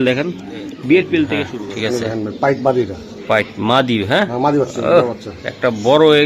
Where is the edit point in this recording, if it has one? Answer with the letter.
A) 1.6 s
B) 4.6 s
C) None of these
A